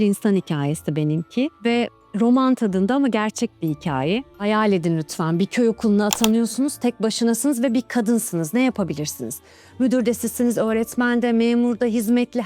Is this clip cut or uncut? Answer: cut